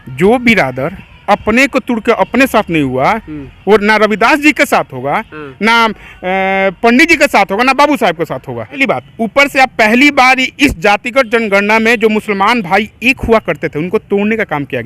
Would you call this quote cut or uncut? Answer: cut